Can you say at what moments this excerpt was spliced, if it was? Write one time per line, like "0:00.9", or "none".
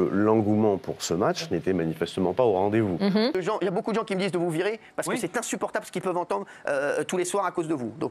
0:03.3